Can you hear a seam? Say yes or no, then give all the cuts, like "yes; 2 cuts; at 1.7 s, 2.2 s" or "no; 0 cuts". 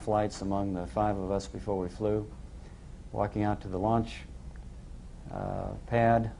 yes; 1 cut; at 4.0 s